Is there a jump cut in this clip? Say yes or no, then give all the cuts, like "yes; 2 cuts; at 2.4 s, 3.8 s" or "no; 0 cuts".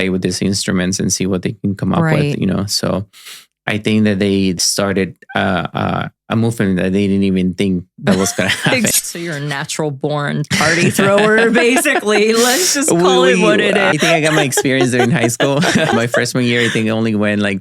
yes; 4 cuts; at 4.6 s, 8.9 s, 13.9 s, 15.9 s